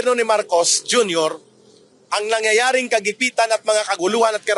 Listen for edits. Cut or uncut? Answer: uncut